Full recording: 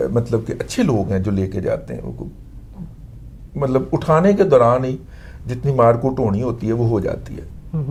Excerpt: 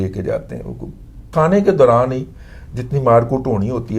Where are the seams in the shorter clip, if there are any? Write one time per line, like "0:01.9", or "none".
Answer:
0:01.3